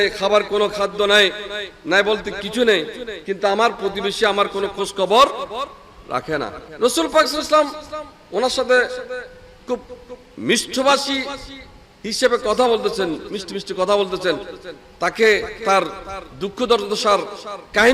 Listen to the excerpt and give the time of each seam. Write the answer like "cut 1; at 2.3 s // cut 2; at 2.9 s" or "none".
cut 1; at 6.6 s